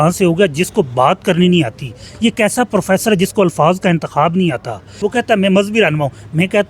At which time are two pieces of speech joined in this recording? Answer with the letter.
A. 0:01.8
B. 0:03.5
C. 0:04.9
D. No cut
C